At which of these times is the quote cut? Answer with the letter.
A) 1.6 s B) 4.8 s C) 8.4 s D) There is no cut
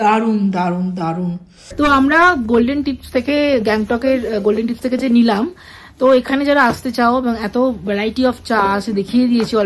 A